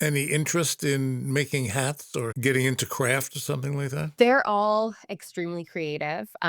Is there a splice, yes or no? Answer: yes